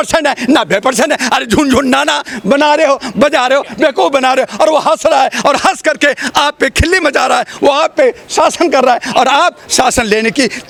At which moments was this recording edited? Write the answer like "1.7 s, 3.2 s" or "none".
none